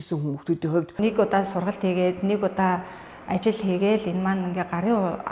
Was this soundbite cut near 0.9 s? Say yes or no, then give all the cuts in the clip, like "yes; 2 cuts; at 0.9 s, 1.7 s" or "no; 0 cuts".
yes; 1 cut; at 0.9 s